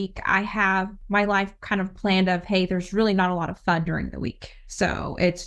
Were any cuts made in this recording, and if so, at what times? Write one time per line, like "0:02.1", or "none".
0:01.0